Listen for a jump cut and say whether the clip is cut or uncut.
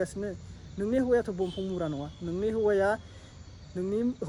uncut